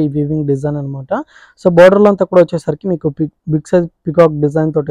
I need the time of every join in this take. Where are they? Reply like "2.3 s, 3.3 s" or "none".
none